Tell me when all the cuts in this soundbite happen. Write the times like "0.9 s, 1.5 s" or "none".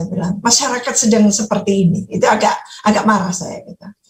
none